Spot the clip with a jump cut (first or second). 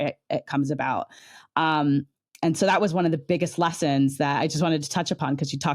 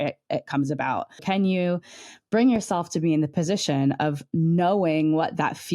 second